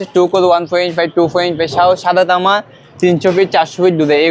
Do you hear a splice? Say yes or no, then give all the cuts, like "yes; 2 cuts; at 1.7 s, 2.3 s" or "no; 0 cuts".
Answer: no; 0 cuts